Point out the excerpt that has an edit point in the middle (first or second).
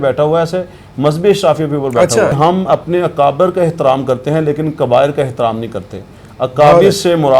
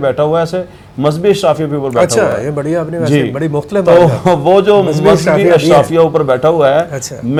first